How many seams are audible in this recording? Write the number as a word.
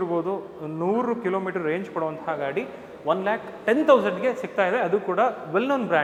zero